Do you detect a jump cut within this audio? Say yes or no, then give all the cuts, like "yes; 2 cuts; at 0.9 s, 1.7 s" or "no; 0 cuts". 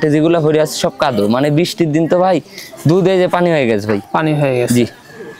no; 0 cuts